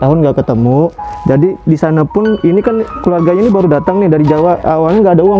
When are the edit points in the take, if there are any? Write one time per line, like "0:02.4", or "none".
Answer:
none